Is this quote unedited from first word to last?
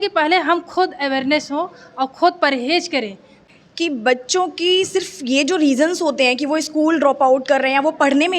no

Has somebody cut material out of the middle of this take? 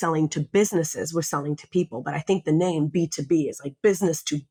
no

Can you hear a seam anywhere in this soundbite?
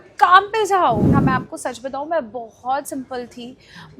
yes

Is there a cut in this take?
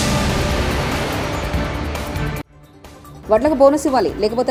no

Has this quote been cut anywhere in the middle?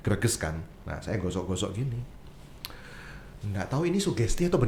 no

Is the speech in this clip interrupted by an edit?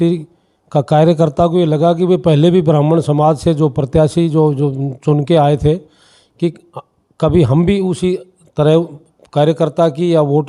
no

